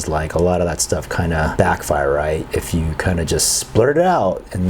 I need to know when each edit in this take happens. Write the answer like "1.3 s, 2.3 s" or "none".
1.5 s, 2.5 s